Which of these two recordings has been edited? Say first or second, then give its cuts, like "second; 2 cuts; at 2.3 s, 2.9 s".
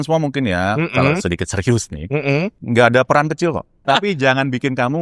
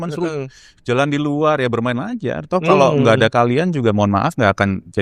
first; 2 cuts; at 2.6 s, 3.8 s